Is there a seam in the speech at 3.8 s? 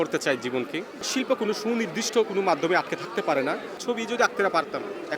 yes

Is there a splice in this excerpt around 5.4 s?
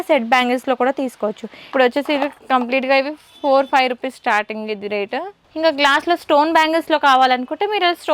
yes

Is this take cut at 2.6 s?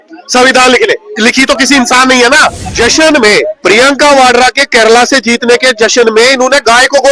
yes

